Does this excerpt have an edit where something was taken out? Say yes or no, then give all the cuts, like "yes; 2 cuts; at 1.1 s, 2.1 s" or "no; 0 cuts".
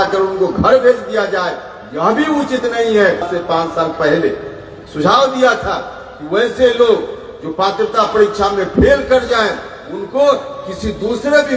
yes; 1 cut; at 3.3 s